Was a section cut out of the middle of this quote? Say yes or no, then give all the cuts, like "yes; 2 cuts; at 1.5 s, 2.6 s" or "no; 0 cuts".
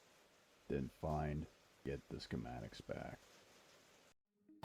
yes; 1 cut; at 1.8 s